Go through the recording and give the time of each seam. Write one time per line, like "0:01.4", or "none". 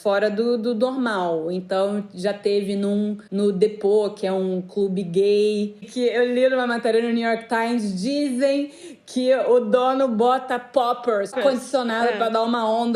0:05.8
0:11.3